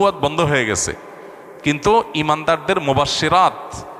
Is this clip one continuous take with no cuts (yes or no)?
yes